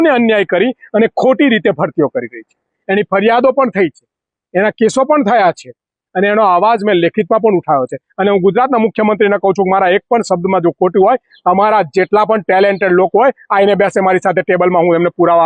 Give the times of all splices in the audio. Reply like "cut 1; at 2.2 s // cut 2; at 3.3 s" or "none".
none

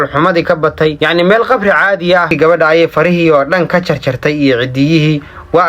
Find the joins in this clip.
cut 1; at 2.3 s

